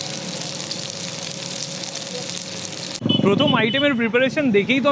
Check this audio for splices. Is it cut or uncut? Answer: uncut